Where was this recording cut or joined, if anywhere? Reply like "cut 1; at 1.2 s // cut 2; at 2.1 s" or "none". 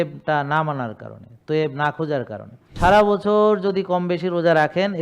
cut 1; at 2.8 s